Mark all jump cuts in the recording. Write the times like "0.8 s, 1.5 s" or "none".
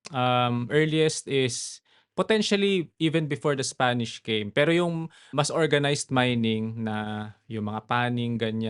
5.3 s